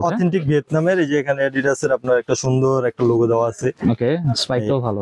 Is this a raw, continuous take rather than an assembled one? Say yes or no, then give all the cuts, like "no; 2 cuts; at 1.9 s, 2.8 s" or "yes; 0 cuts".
yes; 0 cuts